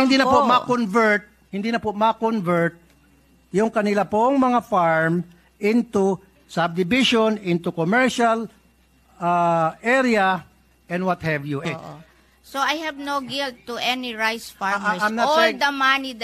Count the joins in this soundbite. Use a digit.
1